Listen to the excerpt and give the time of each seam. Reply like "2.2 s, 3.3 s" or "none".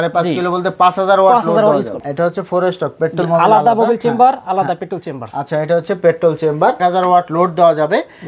2.0 s, 6.8 s